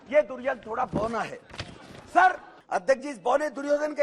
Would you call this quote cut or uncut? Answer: cut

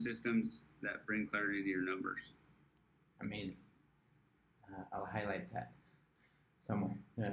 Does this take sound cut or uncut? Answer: uncut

